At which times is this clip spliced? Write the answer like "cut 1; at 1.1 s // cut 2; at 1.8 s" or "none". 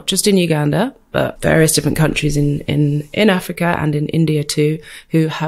cut 1; at 1.3 s